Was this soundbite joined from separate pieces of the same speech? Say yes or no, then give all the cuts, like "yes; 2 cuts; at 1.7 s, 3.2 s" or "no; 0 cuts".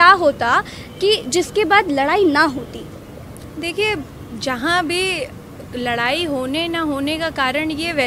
no; 0 cuts